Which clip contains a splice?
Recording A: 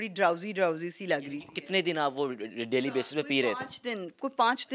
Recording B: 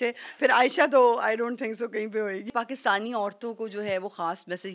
B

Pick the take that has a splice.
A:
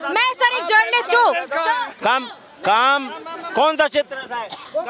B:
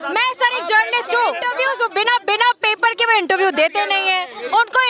B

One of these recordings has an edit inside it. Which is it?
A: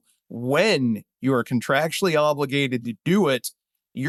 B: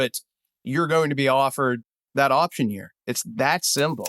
B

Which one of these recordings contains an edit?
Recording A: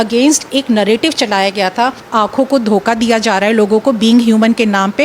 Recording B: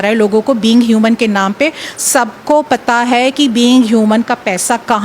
A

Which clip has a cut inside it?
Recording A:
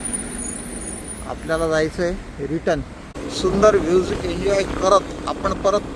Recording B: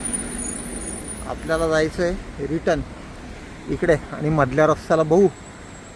A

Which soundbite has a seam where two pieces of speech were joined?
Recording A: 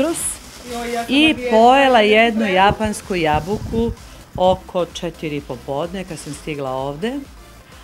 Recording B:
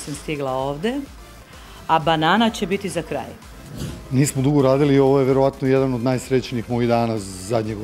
B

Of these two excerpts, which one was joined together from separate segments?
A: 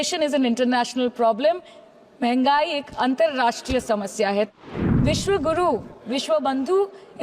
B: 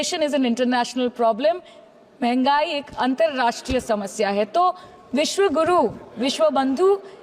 A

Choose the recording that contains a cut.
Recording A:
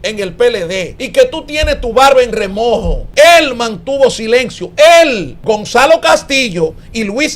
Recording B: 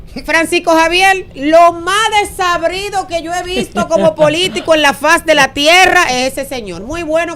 A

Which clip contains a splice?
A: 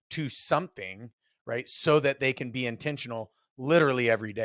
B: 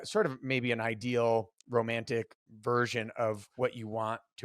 B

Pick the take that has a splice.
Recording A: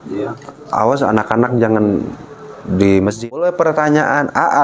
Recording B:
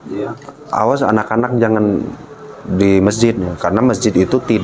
A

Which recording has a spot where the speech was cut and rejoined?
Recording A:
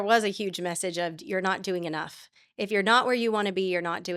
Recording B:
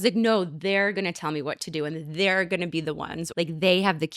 B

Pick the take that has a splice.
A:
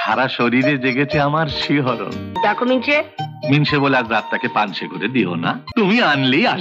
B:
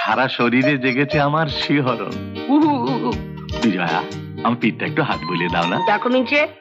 A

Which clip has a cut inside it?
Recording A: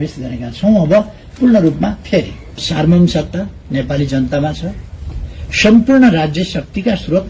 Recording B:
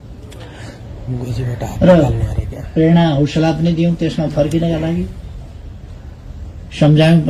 A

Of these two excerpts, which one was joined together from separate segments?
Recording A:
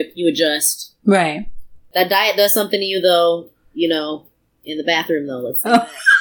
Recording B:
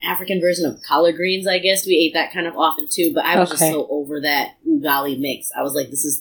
A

